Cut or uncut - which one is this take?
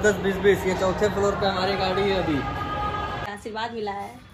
cut